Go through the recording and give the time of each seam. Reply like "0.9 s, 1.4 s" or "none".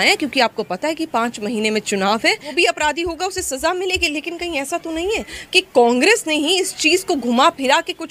2.5 s